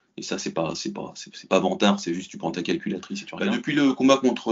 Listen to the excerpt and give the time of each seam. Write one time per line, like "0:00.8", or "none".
0:03.3